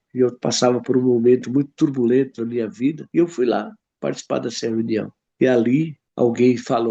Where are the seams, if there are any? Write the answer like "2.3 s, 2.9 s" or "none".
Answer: 3.0 s, 5.2 s, 6.0 s

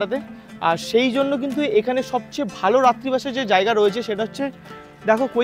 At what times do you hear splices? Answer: none

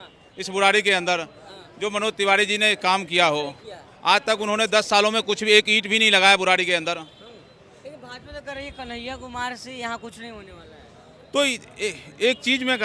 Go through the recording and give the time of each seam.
none

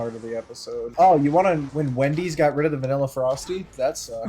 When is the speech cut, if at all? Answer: 0.9 s, 1.7 s

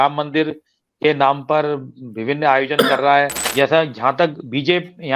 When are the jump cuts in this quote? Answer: 3.4 s

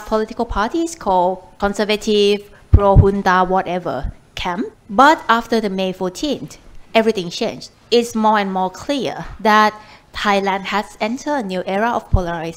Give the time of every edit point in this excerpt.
1.5 s, 4.8 s, 7.7 s

